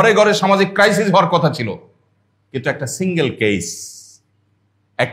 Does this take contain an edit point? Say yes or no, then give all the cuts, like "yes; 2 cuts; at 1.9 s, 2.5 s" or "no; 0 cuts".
no; 0 cuts